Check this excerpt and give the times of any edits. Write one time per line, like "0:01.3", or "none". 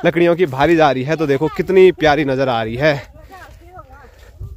none